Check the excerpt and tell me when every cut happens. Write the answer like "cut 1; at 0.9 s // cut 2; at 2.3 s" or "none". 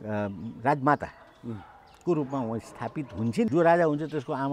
cut 1; at 3.5 s